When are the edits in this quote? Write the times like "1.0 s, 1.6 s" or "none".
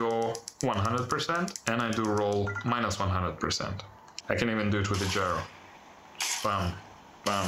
1.6 s, 4.1 s